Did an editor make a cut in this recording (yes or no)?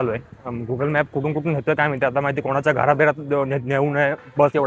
no